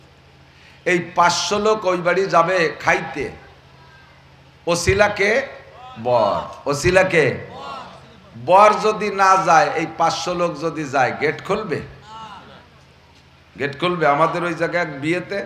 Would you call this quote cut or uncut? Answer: uncut